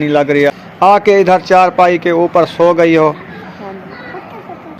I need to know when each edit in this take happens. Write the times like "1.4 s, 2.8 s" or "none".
none